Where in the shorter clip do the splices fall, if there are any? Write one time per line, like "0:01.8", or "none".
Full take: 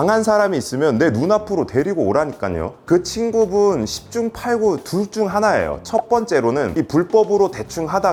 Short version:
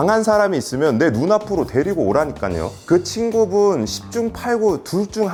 none